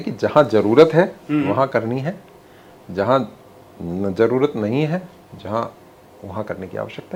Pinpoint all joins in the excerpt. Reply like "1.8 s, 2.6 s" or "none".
none